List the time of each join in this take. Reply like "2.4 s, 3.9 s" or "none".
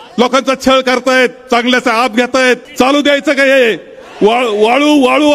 2.7 s